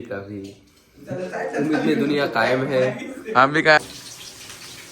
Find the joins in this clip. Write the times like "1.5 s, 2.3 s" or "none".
3.8 s